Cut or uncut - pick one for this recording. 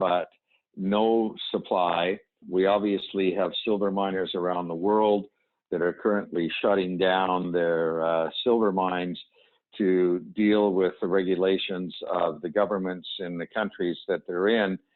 cut